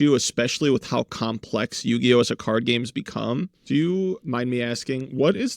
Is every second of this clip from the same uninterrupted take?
no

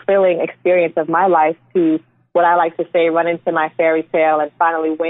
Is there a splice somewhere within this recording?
no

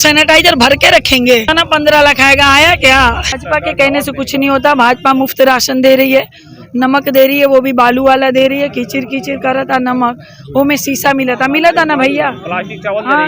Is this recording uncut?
no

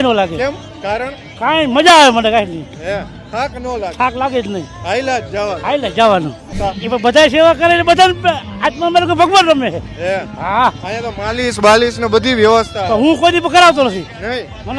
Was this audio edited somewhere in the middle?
yes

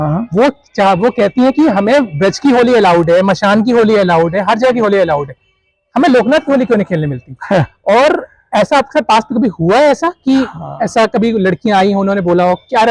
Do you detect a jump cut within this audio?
no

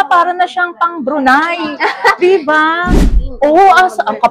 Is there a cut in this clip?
yes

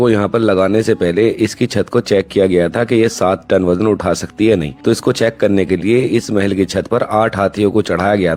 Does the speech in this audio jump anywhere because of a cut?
no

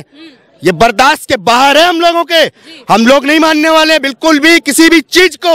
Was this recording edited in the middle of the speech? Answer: no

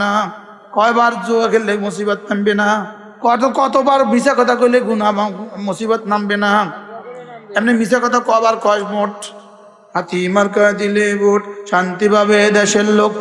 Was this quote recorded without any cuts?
yes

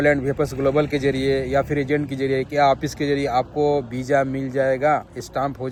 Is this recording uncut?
yes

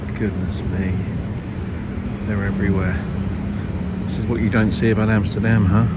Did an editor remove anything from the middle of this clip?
no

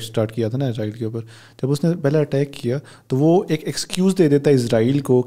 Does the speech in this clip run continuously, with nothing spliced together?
yes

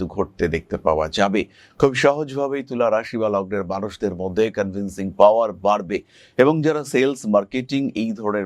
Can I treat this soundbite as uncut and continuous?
yes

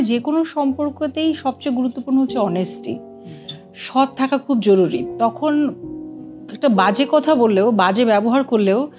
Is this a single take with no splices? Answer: yes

